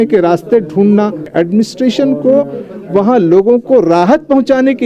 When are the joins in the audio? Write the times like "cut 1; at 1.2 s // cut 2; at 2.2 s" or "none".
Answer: cut 1; at 1.3 s